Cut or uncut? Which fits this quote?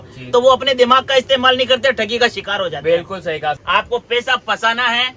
cut